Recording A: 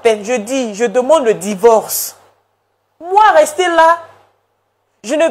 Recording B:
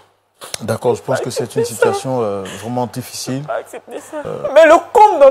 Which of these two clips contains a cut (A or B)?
B